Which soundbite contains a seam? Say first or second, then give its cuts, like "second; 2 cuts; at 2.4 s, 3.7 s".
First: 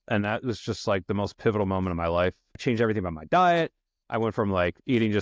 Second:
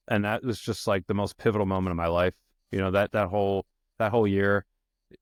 first; 1 cut; at 2.6 s